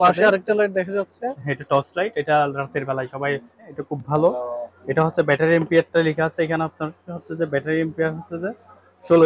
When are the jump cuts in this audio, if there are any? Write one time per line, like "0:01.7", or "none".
none